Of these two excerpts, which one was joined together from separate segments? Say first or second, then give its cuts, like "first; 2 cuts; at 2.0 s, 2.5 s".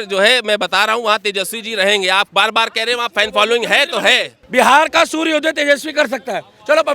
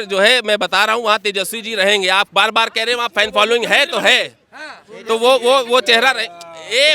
first; 1 cut; at 4.3 s